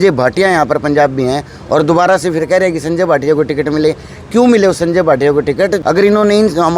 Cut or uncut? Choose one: cut